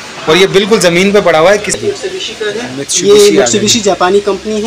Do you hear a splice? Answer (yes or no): yes